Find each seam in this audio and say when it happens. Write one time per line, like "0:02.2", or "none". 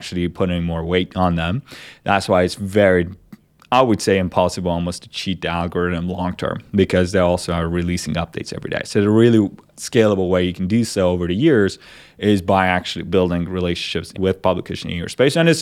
0:14.1